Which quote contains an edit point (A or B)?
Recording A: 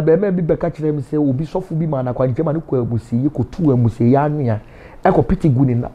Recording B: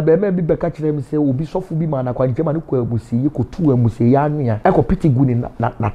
B